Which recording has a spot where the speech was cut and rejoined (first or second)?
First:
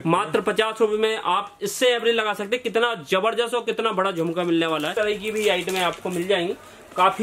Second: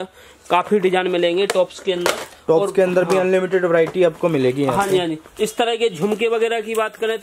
first